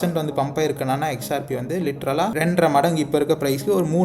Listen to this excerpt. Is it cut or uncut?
cut